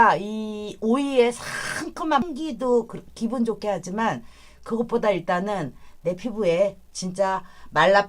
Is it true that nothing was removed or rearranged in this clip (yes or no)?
no